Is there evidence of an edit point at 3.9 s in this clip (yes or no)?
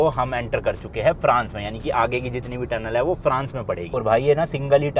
no